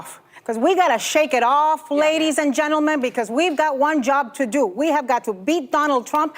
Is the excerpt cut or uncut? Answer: cut